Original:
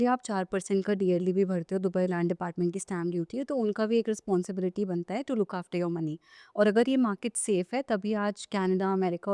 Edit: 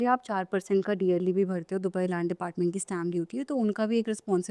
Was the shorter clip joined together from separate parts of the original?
no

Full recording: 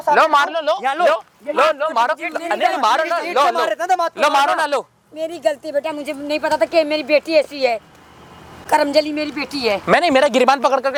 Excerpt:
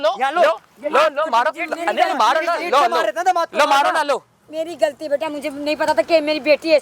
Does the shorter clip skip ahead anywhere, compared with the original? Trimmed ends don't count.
no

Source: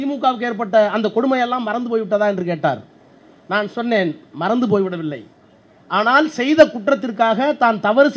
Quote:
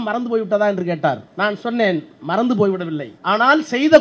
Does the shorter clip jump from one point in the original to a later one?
yes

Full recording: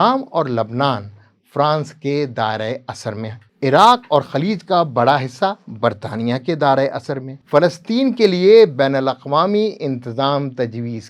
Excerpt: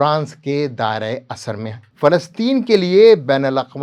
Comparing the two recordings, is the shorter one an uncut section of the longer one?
no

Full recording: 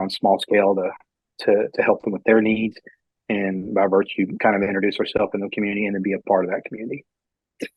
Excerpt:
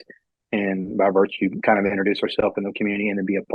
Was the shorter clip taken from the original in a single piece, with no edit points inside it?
yes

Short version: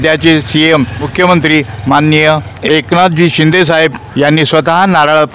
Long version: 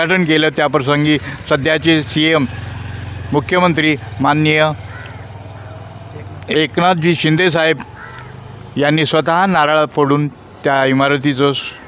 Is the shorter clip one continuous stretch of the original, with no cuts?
no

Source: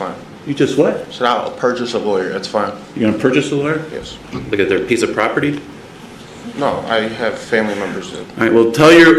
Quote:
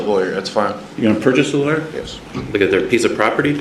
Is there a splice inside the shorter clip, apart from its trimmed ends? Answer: no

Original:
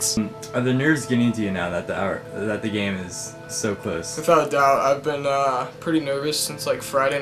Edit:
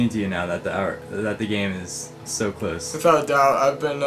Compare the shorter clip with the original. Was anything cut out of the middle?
no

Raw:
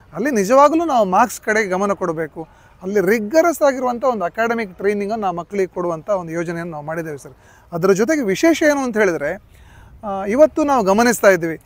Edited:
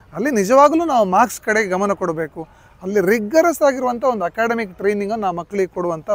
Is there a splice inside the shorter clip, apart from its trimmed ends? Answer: no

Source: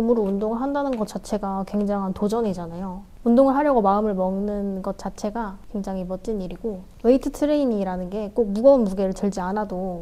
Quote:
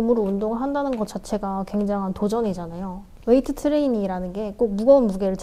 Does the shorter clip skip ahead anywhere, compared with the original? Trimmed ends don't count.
yes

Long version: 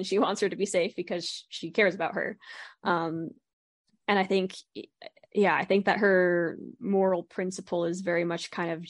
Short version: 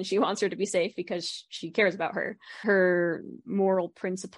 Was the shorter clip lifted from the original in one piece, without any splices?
no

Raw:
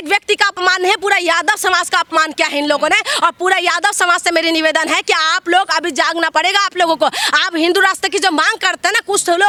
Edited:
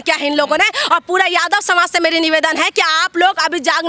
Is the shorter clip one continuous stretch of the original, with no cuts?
yes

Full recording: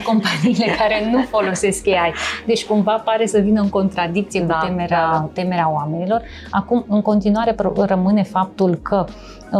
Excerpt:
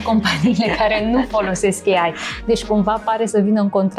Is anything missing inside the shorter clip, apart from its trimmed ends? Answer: no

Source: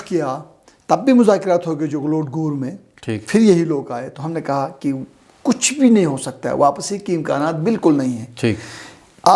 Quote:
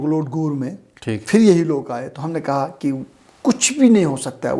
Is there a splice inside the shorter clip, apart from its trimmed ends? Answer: no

